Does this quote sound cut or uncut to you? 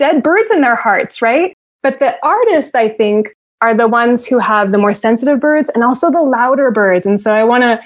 uncut